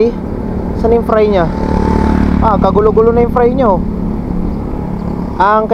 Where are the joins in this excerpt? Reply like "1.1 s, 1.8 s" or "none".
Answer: none